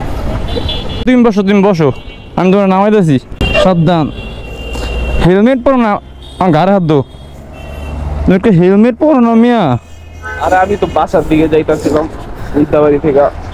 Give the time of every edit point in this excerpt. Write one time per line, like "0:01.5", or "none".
0:01.0
0:03.4